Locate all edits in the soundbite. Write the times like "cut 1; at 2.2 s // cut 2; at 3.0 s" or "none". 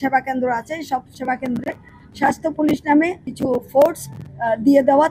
none